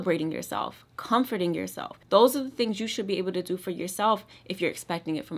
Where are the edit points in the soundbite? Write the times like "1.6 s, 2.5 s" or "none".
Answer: none